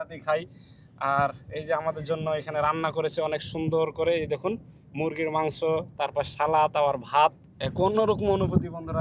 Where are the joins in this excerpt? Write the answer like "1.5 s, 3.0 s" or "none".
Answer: 7.8 s